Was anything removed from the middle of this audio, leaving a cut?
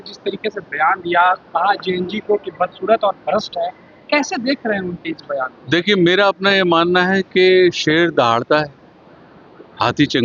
no; 0 cuts

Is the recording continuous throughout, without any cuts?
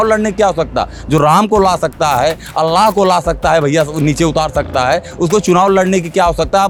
yes; 0 cuts

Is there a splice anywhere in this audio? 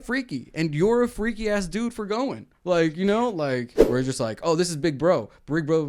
yes; 1 cut; at 3.8 s

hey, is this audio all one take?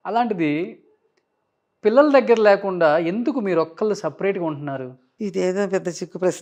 yes; 0 cuts

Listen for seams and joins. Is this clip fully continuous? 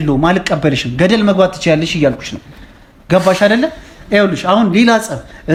yes; 0 cuts

